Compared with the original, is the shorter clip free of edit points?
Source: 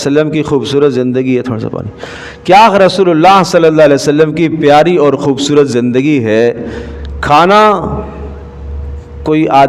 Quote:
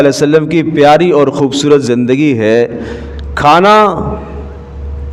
yes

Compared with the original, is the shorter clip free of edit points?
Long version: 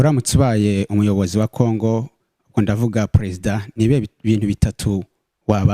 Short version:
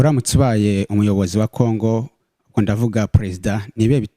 yes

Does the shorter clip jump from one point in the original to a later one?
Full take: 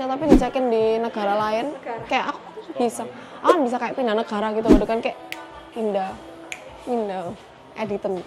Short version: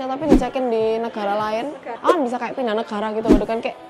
yes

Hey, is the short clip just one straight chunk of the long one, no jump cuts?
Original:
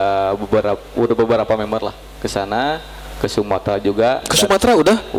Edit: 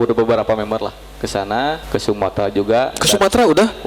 no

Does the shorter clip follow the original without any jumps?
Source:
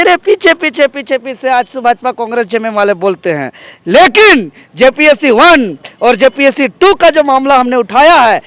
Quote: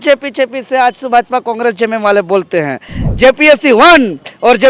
no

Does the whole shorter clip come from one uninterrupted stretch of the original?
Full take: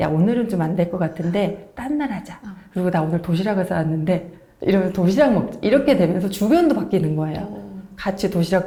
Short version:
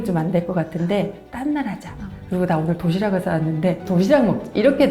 no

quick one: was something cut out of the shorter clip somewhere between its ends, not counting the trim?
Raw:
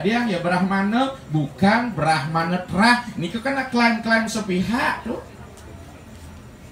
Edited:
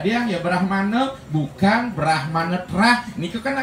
no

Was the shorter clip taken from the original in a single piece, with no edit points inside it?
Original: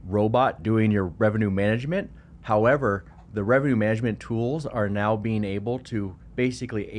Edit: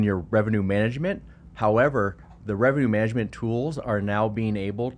yes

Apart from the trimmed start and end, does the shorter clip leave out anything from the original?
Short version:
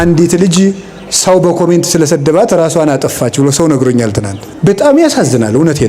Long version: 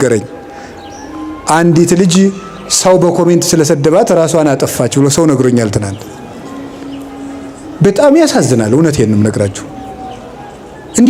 yes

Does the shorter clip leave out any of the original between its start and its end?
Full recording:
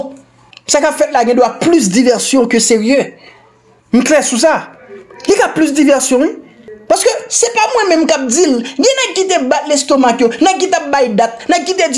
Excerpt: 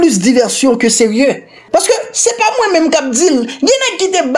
yes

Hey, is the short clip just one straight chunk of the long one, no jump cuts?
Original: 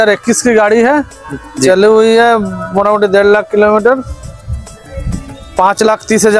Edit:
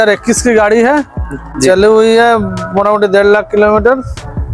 yes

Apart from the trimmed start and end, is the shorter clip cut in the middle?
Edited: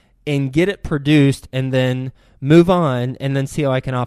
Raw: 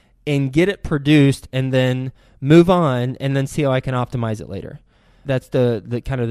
no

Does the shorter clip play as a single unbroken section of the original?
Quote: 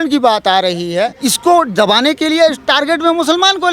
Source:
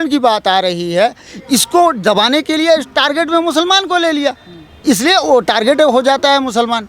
no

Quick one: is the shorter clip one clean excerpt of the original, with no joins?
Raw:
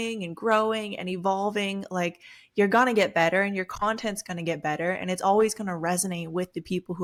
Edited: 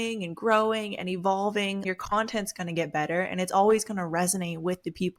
no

